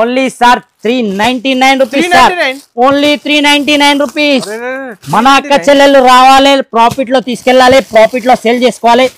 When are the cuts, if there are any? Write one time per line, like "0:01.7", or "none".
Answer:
none